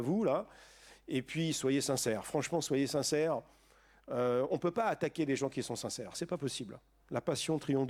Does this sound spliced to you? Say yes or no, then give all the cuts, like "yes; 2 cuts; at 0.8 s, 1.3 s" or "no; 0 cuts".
no; 0 cuts